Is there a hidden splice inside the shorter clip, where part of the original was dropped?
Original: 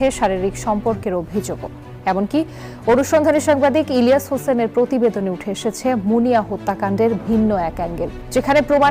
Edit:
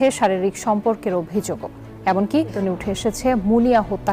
yes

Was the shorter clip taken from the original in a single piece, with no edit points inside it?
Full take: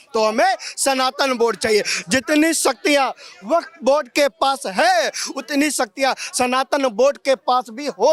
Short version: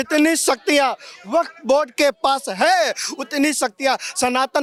yes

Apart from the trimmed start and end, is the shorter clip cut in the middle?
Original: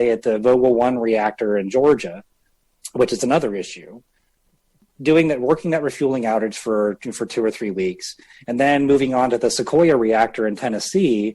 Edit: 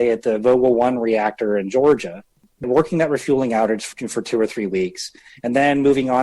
yes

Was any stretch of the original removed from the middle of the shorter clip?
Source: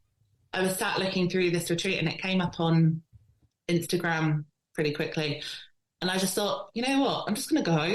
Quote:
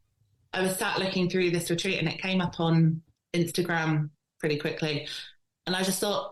yes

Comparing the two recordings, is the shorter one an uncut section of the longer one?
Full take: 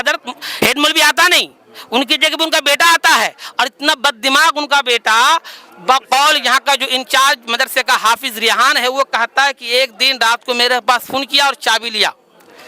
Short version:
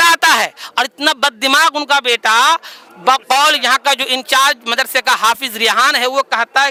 yes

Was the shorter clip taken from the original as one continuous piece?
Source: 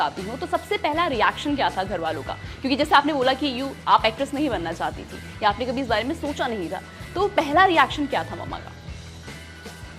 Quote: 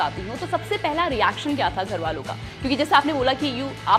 yes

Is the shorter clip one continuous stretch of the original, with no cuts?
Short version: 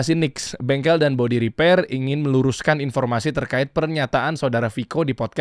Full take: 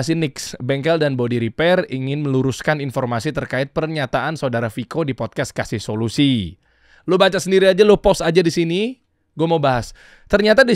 yes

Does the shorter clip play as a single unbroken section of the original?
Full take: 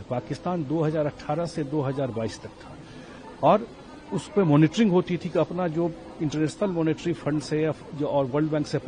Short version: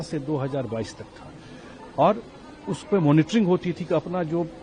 yes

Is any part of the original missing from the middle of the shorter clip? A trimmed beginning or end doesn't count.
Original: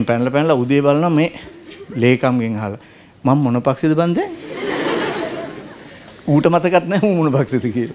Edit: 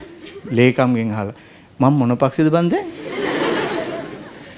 no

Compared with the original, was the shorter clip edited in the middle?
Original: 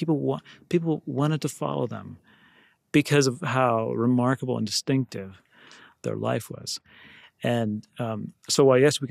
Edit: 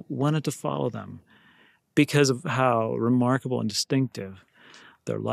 no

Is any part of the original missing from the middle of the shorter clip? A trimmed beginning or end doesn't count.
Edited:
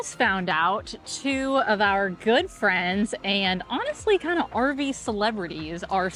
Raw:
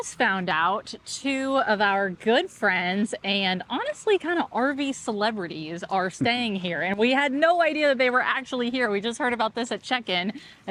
no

